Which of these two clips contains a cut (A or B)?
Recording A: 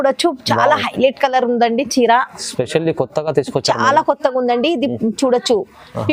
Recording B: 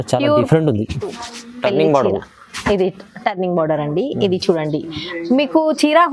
B